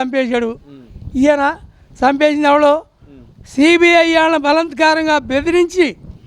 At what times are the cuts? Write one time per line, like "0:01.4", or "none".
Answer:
none